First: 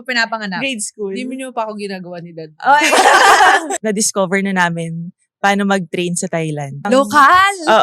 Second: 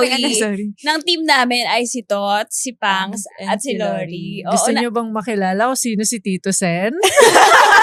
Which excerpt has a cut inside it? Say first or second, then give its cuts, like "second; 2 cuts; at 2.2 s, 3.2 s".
first; 2 cuts; at 3.8 s, 6.9 s